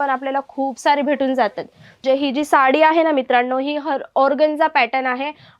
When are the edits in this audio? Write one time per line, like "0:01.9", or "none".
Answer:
0:02.0